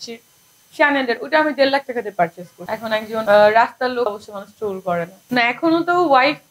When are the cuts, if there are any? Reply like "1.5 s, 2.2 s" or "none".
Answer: 2.8 s, 4.1 s, 5.2 s